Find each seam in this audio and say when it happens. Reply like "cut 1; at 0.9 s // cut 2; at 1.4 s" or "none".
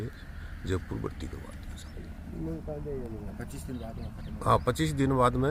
none